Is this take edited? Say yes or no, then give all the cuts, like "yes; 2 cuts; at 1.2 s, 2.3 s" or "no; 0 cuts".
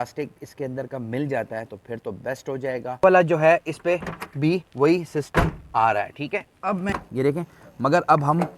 yes; 2 cuts; at 3.0 s, 7.0 s